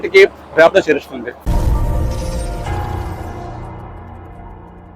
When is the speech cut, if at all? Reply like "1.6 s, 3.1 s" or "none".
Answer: 1.4 s

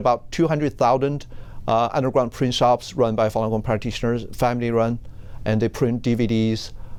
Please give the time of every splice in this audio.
none

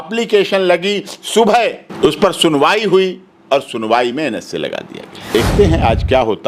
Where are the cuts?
1.9 s, 5.3 s

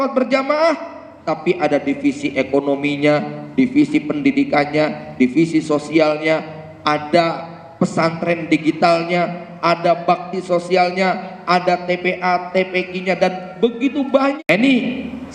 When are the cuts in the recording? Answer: 14.4 s

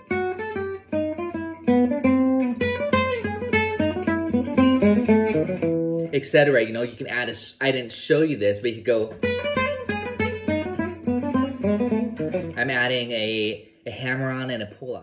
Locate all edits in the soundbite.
none

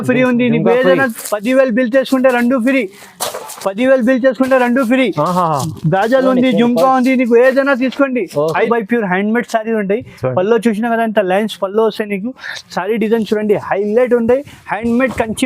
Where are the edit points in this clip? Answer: 8.7 s

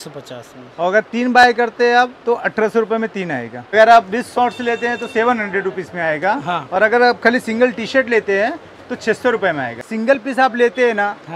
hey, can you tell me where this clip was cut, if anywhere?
3.7 s, 9.9 s

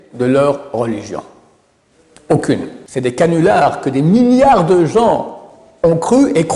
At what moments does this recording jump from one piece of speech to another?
2.8 s

